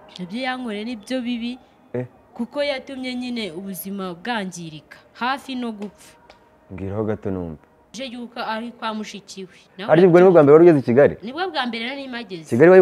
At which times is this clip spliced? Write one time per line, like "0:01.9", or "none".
0:08.0